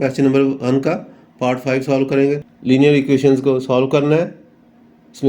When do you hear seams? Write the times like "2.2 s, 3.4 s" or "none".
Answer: 2.5 s